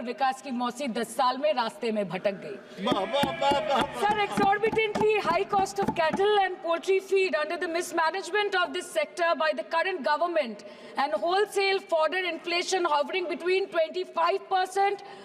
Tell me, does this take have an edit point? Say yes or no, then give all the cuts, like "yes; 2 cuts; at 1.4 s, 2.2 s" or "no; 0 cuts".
no; 0 cuts